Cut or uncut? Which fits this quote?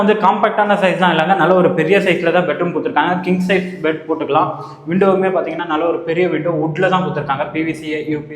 uncut